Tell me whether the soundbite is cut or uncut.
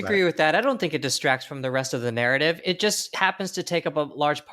cut